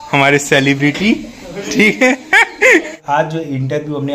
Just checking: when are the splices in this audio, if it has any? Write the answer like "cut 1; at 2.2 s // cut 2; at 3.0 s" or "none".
cut 1; at 3.0 s